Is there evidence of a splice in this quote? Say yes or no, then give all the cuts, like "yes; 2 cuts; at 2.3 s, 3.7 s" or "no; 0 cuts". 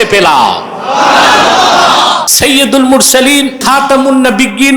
yes; 2 cuts; at 2.3 s, 3.6 s